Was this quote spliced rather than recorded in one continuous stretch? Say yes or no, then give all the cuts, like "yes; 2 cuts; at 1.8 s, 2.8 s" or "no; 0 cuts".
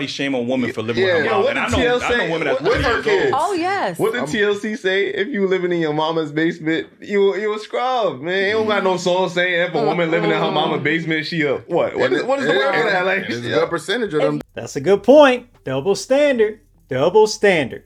no; 0 cuts